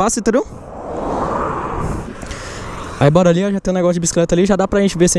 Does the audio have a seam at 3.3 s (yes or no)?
no